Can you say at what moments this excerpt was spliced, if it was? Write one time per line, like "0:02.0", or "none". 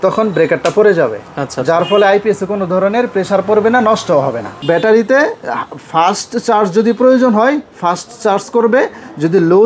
0:04.5